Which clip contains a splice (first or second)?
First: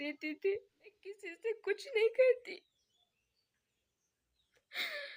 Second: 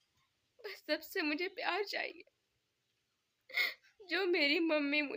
first